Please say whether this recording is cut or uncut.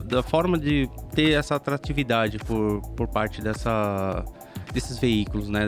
uncut